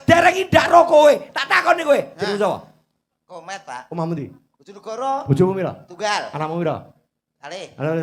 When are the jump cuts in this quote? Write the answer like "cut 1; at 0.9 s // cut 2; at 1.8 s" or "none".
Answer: none